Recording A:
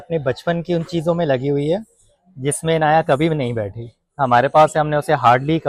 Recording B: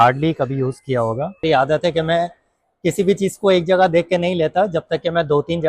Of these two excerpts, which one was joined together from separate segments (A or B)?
B